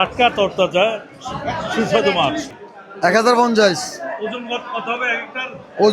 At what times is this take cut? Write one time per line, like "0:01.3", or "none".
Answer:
0:02.5